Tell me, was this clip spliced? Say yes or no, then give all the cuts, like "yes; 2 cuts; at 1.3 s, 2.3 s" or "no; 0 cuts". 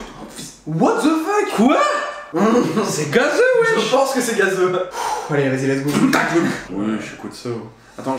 yes; 1 cut; at 4.9 s